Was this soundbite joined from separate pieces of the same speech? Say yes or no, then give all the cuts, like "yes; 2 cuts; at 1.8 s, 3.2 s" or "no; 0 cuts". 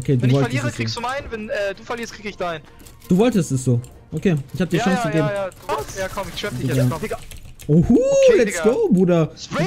yes; 1 cut; at 7.0 s